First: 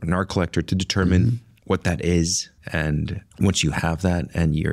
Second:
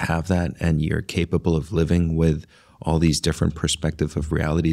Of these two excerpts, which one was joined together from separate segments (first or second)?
first